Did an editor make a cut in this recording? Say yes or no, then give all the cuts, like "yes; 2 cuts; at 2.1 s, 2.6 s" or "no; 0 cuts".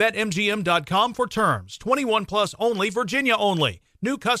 no; 0 cuts